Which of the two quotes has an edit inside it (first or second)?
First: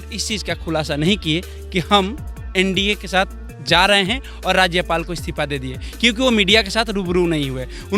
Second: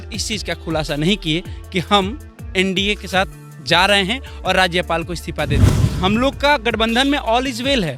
second